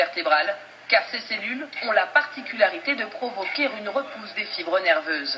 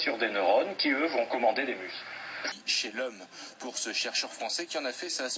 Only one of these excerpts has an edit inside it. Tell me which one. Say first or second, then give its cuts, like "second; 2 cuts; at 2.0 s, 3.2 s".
second; 1 cut; at 2.4 s